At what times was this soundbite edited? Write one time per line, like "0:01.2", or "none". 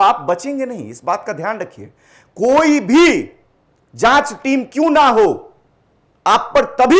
none

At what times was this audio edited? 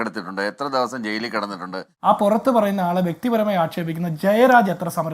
0:01.9

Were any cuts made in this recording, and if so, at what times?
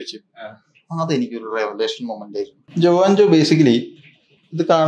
0:02.6

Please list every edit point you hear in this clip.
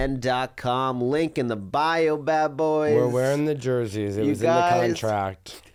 none

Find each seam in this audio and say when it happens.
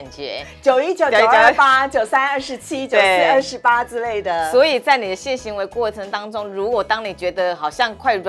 none

